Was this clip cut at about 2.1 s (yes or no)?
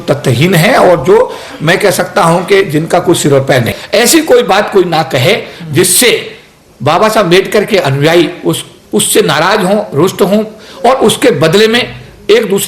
no